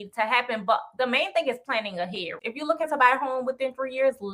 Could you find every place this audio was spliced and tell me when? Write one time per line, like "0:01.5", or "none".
0:02.3